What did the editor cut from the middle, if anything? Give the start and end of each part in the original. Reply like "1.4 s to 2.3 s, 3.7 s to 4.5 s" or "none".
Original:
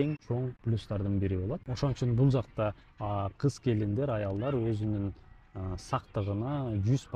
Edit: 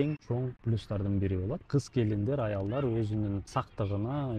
1.6 s to 3.3 s, 5.2 s to 5.8 s